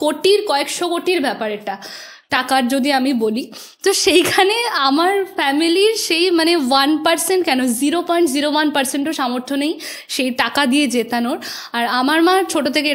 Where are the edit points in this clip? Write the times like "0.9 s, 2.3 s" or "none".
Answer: none